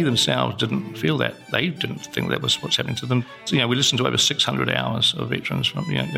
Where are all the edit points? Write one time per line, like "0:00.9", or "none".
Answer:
0:02.1
0:03.4

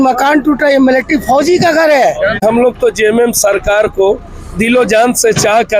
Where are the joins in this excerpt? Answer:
0:02.4

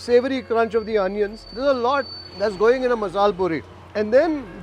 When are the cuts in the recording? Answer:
0:01.5
0:02.2

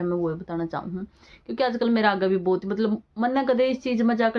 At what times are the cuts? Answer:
none

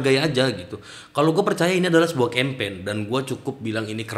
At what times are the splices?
none

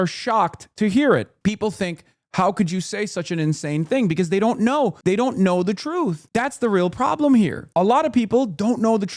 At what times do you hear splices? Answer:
0:01.3
0:05.0
0:06.2
0:07.6

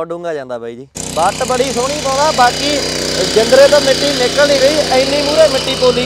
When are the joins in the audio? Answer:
0:01.0

